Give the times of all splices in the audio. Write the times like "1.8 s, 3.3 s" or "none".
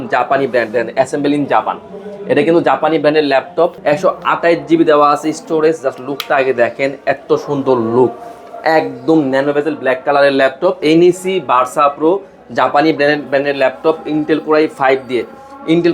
3.8 s, 10.8 s